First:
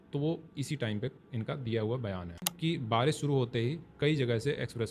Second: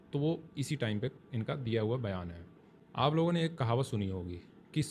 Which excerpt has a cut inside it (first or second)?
first